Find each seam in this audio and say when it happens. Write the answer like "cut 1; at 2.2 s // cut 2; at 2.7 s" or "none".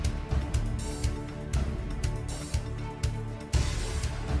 cut 1; at 1.0 s